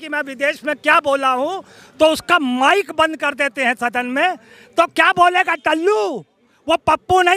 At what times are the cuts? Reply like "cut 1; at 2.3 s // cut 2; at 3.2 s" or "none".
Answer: none